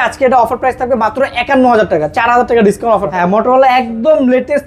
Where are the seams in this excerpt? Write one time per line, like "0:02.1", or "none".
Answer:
0:03.1